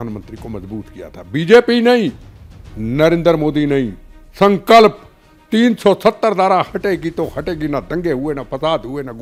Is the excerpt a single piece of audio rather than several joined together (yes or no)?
yes